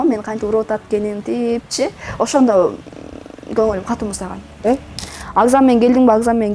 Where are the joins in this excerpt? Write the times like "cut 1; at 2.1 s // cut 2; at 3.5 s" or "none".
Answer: cut 1; at 5.0 s